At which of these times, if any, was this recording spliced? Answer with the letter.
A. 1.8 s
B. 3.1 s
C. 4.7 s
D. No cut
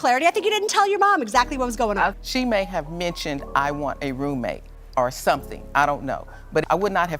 D